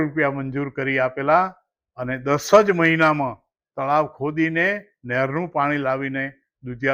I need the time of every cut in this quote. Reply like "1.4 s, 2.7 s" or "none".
none